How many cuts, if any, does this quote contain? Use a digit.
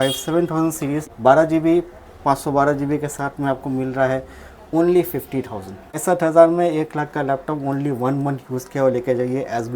2